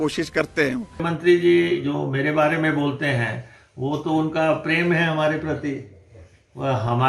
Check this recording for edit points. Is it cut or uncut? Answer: cut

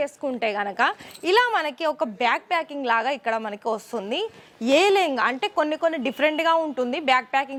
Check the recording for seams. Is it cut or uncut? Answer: uncut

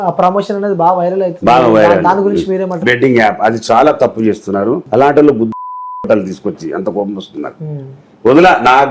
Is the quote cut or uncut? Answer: cut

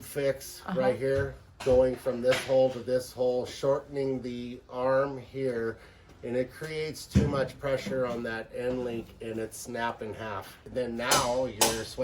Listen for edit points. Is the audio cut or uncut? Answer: cut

